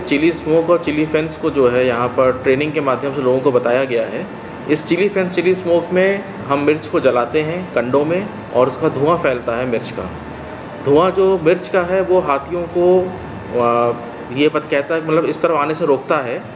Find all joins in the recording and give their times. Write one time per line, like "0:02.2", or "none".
none